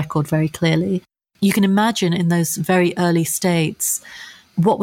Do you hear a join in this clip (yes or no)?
yes